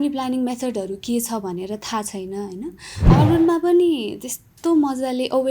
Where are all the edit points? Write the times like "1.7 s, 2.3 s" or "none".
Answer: 3.1 s